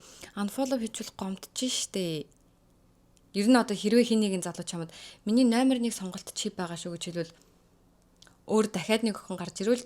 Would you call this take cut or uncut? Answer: cut